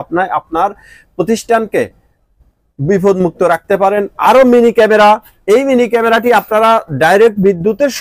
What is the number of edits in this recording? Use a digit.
1